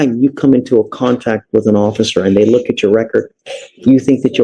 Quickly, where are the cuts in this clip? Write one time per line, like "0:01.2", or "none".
none